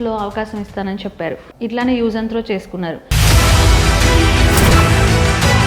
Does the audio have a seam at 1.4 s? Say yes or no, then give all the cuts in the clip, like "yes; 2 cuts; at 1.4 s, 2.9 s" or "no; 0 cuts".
yes; 1 cut; at 1.4 s